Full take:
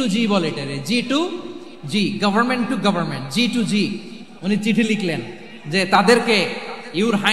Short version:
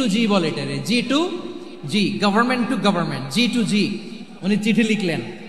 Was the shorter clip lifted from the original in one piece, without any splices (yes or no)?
yes